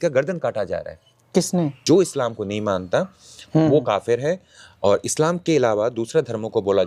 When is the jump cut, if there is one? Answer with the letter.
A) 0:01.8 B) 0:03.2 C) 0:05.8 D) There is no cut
A